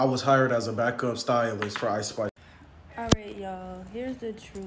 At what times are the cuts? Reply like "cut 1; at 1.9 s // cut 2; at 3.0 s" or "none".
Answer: cut 1; at 2.4 s

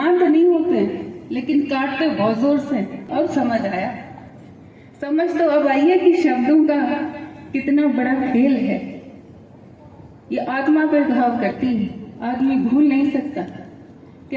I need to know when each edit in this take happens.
cut 1; at 3.1 s

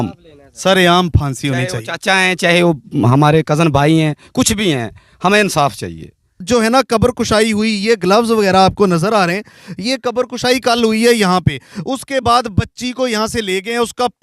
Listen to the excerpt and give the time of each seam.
cut 1; at 6.4 s

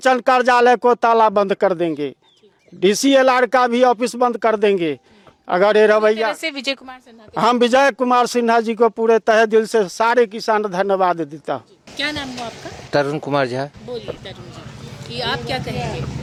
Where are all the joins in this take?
none

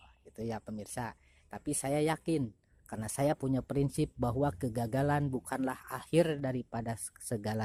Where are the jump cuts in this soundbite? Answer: none

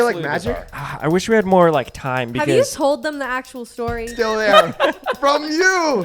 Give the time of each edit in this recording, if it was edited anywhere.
cut 1; at 4.1 s

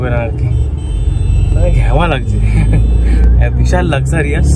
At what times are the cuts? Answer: none

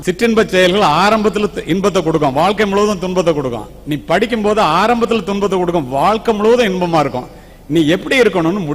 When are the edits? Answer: none

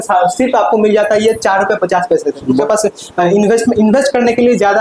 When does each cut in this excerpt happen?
cut 1; at 2.5 s

